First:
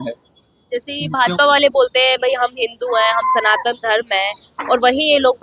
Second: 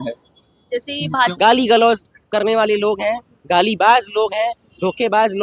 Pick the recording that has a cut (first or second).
second